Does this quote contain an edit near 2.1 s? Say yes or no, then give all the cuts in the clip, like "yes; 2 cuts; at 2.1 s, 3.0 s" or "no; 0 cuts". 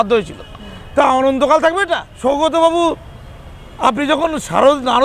yes; 1 cut; at 2.1 s